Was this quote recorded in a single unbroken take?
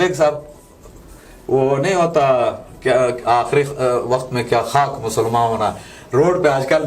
yes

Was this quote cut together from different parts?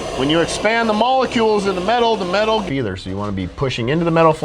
yes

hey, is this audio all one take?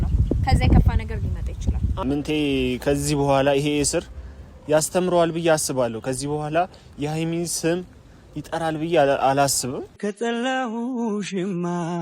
no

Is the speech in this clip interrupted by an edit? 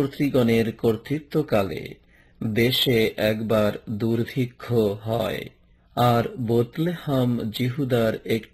yes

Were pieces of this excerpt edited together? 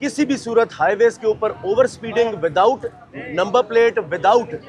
no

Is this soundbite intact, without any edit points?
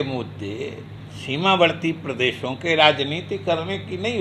yes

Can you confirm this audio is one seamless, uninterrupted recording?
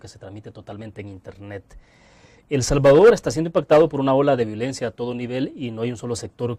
yes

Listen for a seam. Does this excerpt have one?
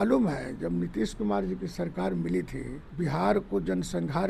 yes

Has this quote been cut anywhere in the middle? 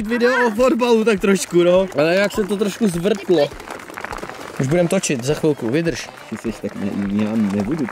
no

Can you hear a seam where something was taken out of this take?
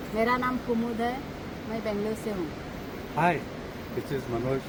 no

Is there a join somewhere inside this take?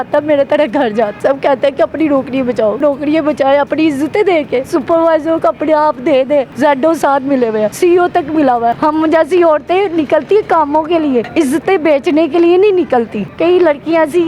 yes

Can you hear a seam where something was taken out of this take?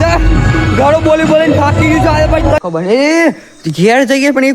yes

